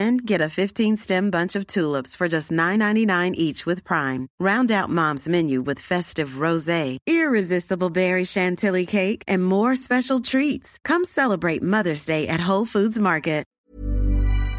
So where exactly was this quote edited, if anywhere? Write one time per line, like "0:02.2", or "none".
0:13.5